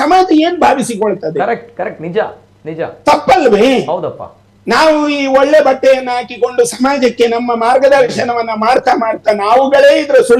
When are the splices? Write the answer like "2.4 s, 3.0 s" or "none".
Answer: none